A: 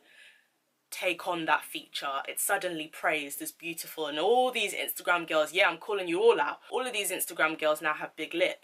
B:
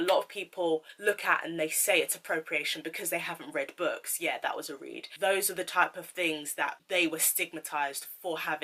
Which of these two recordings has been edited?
B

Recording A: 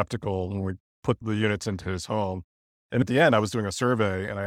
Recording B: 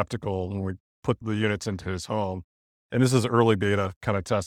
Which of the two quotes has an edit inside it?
A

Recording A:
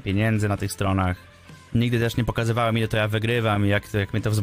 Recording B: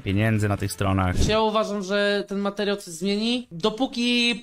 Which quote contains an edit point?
B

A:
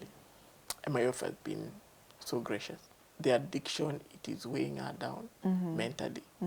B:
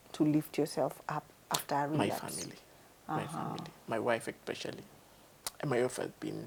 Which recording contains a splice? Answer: A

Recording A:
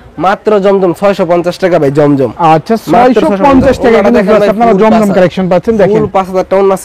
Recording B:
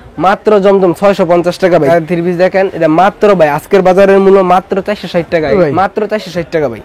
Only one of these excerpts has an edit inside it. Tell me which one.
B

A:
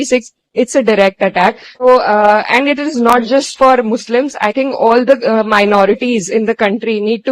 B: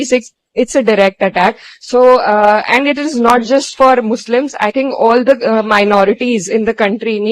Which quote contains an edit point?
A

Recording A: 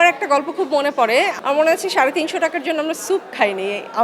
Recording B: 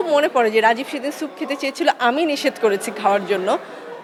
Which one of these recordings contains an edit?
A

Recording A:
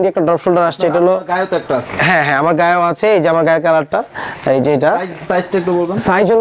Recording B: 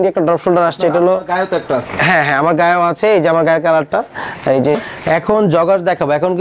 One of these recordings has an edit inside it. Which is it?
B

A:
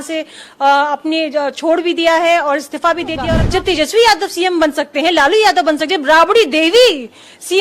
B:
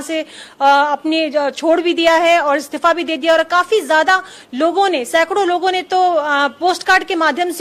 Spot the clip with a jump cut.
A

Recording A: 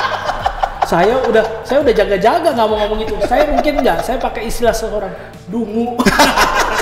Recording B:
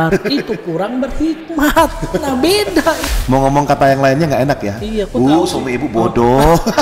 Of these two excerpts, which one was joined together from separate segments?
B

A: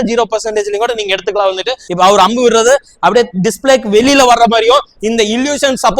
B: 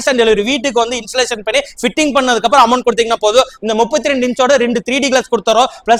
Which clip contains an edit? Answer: A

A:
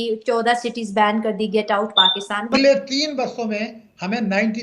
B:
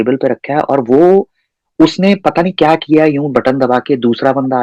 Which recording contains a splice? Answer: A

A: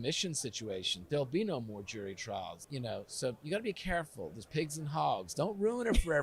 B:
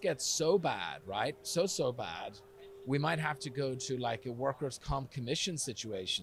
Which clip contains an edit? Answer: A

